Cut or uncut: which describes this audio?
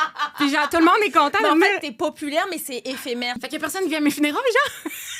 cut